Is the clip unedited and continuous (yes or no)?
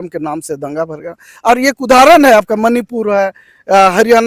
yes